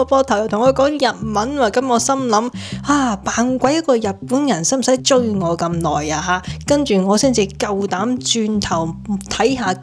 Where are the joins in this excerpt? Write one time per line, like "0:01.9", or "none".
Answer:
0:05.0
0:06.5